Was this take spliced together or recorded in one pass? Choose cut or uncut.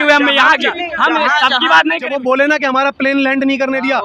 cut